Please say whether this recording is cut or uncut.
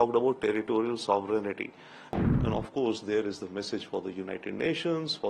cut